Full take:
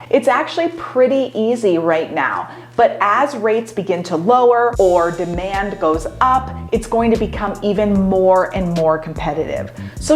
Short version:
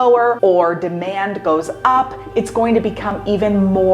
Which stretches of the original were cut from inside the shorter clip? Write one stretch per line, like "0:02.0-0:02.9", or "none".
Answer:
none